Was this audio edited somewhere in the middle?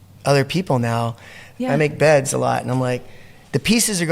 yes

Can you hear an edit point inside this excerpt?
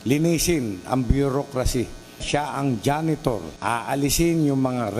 yes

